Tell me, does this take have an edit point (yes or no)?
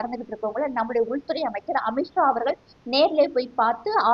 no